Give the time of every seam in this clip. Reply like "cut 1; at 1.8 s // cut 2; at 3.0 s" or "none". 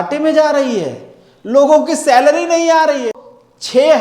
cut 1; at 3.1 s